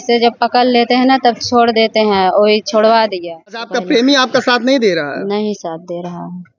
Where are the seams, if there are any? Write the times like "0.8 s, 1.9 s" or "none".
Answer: 3.4 s